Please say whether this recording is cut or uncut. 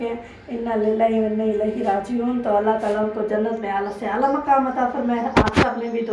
uncut